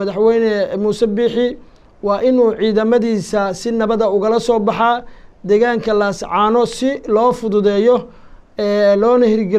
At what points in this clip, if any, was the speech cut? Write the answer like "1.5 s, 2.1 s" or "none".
none